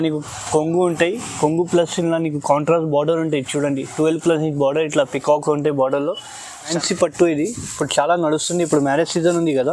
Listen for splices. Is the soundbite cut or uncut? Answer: cut